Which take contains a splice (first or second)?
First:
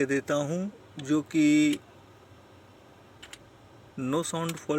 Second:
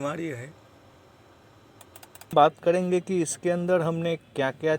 second